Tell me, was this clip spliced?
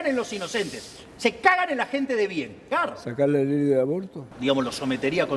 yes; 2 cuts; at 2.6 s, 4.2 s

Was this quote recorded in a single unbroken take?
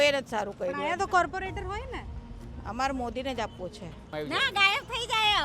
no; 1 cut; at 4.1 s

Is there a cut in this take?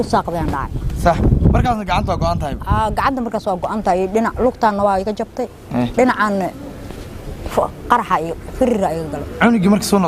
no; 0 cuts

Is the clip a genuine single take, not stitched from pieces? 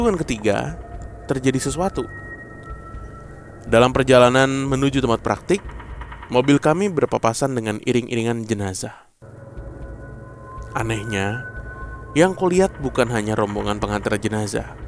yes; 0 cuts

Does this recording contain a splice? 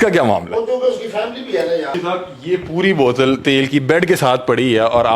yes; 1 cut; at 2.0 s

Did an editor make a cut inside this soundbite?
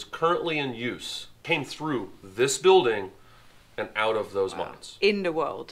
yes; 1 cut; at 1.4 s

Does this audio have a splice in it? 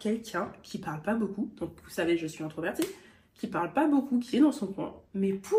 no; 0 cuts

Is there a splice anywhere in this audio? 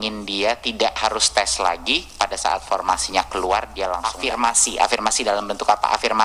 yes; 1 cut; at 4.1 s

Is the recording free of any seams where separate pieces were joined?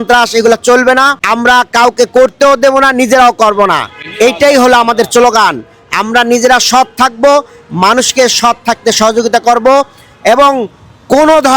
no; 1 cut; at 1.2 s

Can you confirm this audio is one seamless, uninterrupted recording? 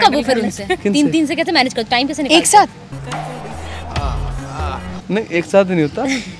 yes; 0 cuts

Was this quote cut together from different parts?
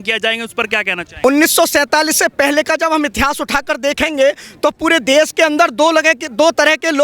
yes; 1 cut; at 1.0 s

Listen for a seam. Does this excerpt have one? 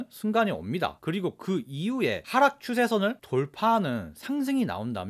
yes; 2 cuts; at 1.0 s, 2.2 s

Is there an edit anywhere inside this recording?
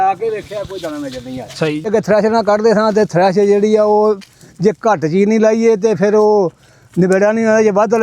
yes; 1 cut; at 1.9 s

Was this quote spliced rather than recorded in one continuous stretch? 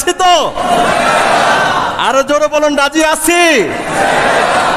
no; 0 cuts

